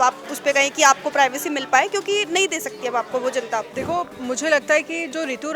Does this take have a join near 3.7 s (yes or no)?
yes